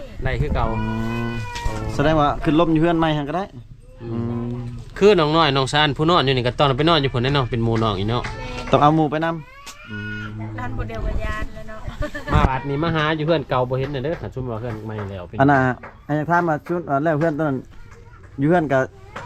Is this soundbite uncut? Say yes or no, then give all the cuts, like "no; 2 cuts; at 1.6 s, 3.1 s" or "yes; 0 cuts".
yes; 0 cuts